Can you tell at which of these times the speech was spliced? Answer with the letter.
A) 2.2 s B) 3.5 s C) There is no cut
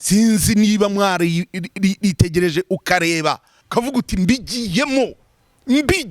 B